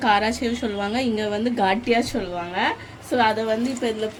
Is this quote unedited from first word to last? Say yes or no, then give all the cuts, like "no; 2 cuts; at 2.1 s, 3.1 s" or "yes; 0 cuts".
yes; 0 cuts